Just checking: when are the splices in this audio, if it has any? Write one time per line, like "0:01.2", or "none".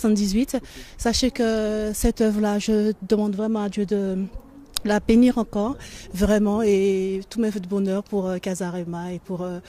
none